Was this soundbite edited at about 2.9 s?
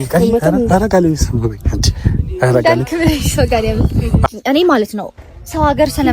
no; 1 cut; at 4.2 s

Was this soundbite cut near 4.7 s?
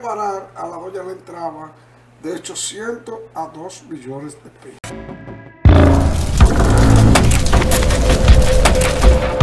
yes; 1 cut; at 4.7 s

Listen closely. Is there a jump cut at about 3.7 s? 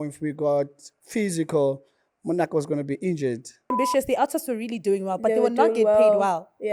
yes; 1 cut; at 3.7 s

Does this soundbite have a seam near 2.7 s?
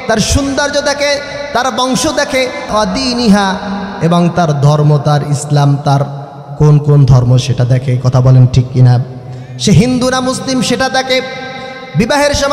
yes; 1 cut; at 2.7 s

